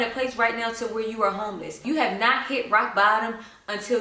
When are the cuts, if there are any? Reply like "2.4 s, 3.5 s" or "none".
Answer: 1.8 s